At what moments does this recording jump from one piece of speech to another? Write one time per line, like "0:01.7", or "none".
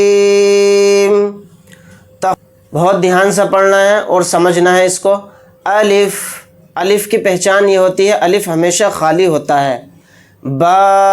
0:02.3

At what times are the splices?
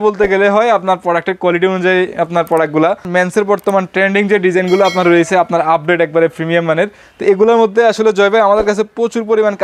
0:03.1
0:07.0

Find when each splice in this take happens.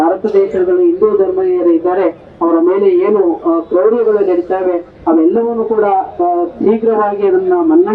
none

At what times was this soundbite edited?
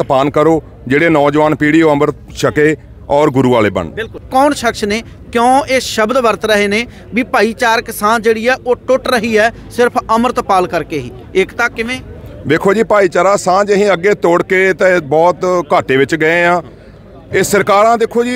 0:04.2

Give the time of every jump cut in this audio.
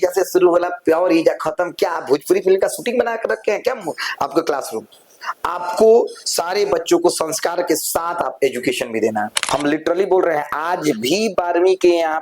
0:09.4

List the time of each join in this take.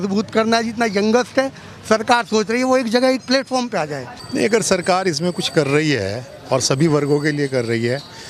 0:04.2

